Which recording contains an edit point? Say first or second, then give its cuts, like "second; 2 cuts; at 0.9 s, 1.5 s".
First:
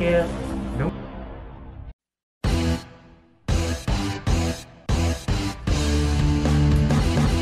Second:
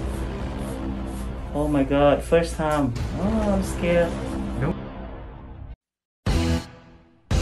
first; 1 cut; at 4.7 s